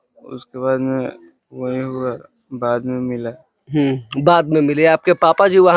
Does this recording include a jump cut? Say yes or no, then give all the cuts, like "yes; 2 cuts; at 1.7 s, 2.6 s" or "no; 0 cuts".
no; 0 cuts